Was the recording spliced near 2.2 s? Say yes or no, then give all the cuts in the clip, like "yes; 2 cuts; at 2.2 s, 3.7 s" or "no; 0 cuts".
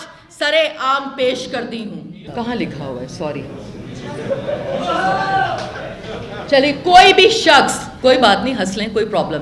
yes; 1 cut; at 2.2 s